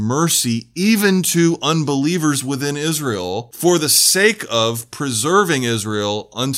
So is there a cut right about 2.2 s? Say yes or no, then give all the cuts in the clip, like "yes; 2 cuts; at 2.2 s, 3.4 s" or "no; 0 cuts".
no; 1 cut; at 3.5 s